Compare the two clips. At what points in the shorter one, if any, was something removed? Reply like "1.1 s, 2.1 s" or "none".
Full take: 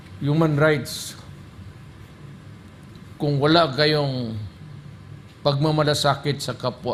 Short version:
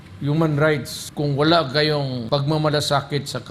1.0 s, 2.2 s